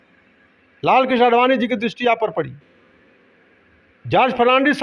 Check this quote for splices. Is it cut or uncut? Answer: uncut